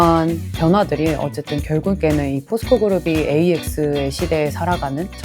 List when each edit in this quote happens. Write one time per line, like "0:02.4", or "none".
0:02.0